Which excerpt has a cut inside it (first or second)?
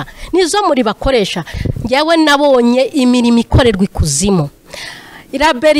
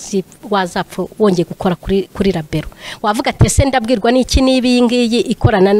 first